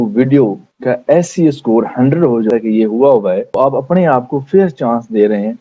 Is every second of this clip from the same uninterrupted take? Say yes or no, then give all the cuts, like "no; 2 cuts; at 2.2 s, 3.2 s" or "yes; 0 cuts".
no; 1 cut; at 2.5 s